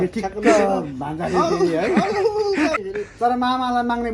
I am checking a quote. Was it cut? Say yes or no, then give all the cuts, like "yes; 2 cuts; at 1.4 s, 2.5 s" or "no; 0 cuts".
yes; 1 cut; at 2.8 s